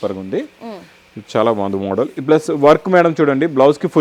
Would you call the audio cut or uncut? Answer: uncut